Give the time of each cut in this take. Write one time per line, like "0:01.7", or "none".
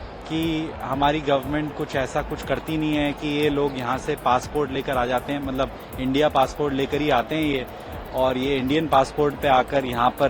none